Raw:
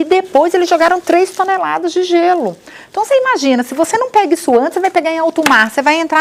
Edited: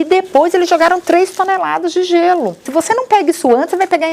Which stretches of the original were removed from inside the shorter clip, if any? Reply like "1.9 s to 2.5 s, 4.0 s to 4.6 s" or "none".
2.6 s to 3.7 s